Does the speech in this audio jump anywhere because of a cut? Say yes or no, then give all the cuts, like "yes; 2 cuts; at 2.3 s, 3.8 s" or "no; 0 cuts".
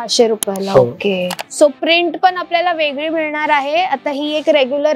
yes; 1 cut; at 1.3 s